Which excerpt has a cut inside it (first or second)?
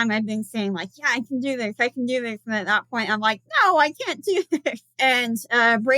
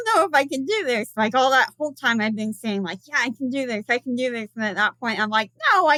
first